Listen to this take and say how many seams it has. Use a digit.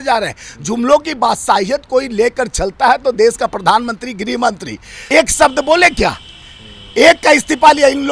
1